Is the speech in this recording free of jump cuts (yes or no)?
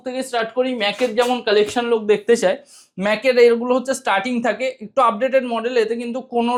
yes